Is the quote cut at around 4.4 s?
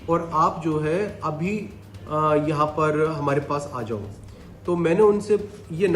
no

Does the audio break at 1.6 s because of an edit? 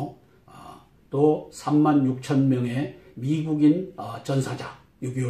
no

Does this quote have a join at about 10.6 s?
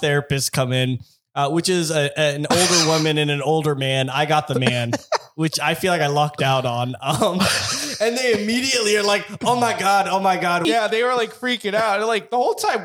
yes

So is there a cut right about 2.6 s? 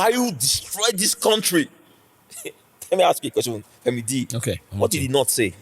no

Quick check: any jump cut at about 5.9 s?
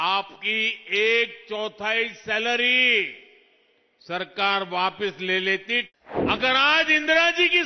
yes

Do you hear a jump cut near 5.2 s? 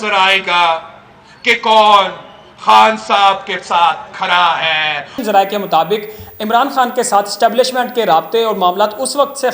yes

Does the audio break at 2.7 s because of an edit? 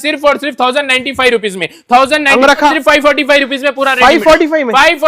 yes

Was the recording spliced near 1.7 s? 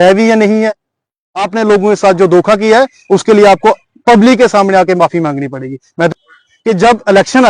no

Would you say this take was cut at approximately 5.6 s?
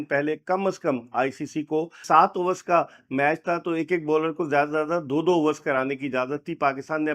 no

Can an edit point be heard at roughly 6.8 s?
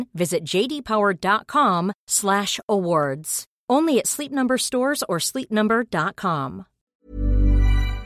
yes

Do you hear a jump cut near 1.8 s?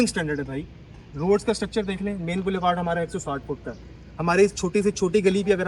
no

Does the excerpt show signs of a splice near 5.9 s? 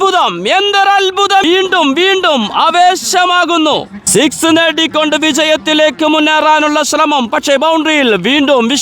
no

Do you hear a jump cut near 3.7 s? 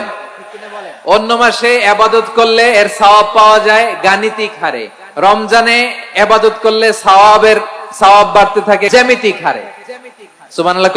no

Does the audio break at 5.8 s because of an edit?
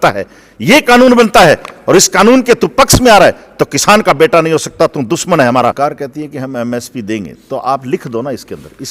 yes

